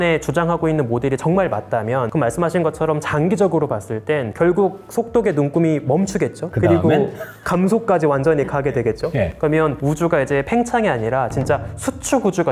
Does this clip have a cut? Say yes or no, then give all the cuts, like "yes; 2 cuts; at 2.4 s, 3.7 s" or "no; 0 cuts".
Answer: no; 0 cuts